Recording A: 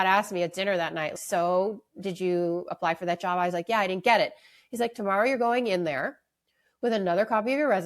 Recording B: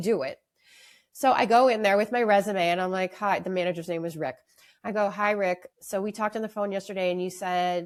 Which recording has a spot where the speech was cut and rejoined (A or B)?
A